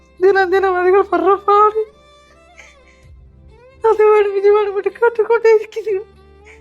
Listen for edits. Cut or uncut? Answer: cut